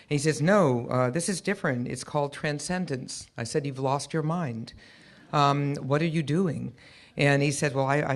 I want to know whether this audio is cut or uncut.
cut